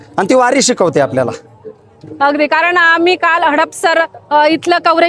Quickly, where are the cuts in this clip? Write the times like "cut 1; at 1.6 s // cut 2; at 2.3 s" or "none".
none